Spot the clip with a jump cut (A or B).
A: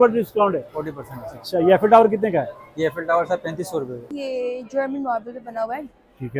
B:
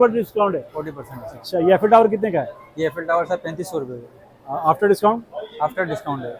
A